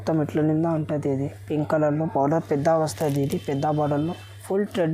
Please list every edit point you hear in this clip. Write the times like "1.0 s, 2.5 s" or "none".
none